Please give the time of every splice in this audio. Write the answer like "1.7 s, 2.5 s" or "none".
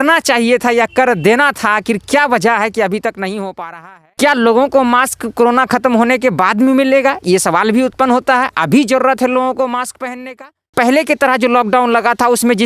4.0 s, 10.7 s